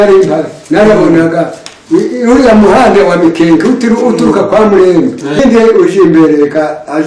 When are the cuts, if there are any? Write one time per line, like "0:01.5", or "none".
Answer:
0:05.4